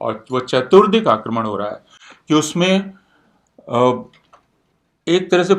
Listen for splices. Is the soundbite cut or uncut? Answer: uncut